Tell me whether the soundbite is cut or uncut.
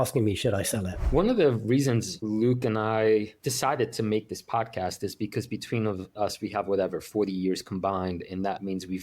cut